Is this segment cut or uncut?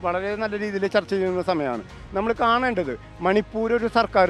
uncut